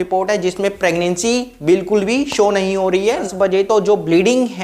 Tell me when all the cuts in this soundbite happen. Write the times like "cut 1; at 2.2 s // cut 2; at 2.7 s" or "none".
cut 1; at 3.3 s